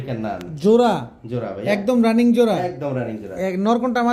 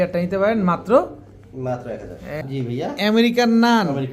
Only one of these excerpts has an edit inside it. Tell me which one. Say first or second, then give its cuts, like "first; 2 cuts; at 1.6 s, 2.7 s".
second; 1 cut; at 2.5 s